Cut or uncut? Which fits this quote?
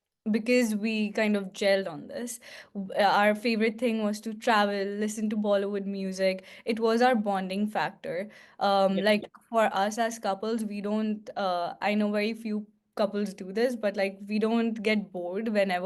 uncut